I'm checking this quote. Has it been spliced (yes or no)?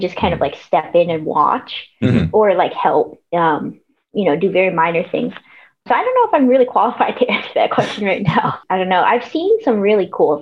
yes